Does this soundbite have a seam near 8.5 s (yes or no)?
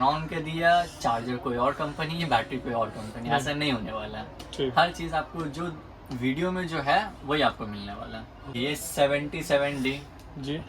yes